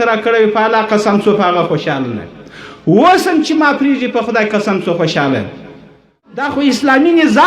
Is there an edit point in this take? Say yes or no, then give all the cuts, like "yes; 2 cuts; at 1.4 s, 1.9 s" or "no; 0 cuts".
yes; 1 cut; at 6.1 s